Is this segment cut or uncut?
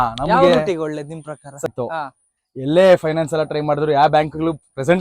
cut